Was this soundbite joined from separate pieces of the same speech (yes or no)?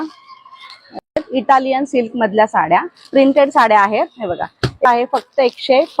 yes